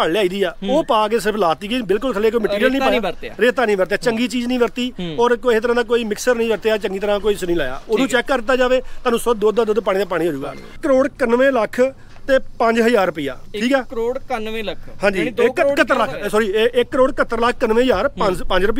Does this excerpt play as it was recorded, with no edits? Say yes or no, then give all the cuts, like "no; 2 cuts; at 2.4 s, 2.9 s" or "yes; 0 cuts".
no; 1 cut; at 10.8 s